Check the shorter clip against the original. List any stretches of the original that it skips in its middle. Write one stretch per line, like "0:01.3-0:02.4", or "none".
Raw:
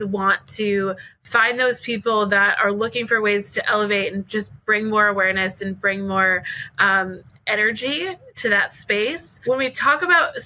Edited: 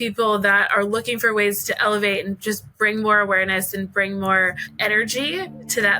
0:06.5-0:07.3